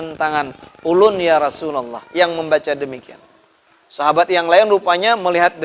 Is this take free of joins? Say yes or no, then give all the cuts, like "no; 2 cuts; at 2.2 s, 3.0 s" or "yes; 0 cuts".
yes; 0 cuts